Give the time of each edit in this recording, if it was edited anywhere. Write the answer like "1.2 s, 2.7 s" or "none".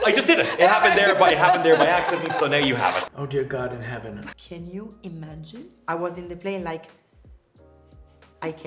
3.0 s, 4.3 s